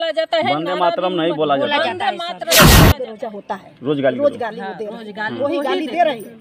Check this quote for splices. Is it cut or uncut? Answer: cut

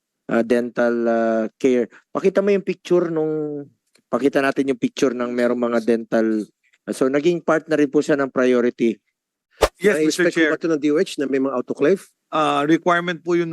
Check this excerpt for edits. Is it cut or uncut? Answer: cut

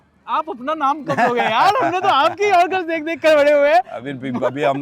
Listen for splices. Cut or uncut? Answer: uncut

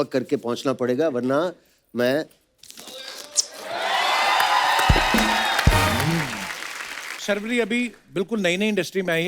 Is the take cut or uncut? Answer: cut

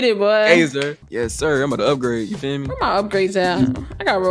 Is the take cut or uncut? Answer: cut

